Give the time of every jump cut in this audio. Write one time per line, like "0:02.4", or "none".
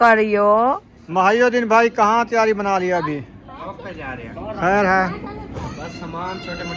0:00.9
0:03.6